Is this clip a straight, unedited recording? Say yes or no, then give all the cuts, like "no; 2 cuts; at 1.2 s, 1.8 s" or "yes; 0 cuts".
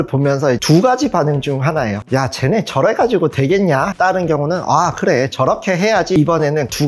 no; 2 cuts; at 3.9 s, 6.2 s